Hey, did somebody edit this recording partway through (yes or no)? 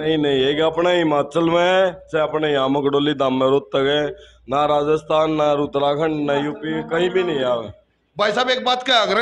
no